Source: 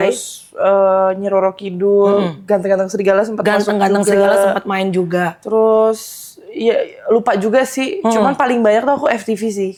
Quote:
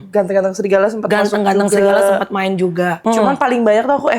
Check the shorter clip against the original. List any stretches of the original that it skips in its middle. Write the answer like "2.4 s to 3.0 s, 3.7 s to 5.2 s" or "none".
5.3 s to 8.0 s

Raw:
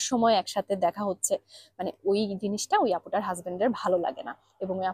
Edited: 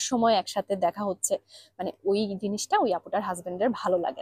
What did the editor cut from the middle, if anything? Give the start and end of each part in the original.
none

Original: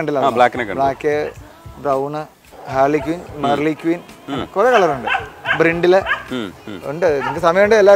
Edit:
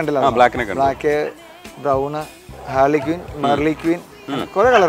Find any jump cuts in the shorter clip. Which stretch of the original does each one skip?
none

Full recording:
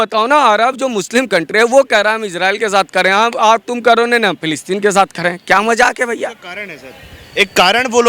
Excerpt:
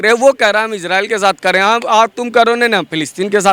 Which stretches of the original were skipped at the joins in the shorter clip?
none

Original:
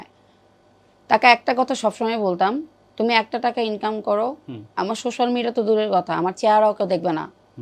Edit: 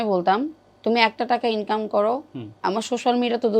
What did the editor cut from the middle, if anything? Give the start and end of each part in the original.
none

